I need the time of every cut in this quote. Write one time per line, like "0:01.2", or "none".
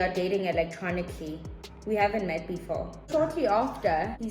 0:03.1